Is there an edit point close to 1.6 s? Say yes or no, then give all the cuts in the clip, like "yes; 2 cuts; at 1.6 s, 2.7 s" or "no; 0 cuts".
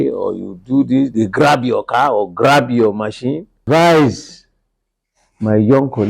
no; 1 cut; at 3.6 s